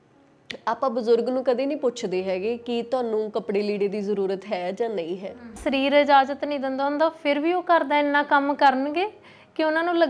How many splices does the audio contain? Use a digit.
1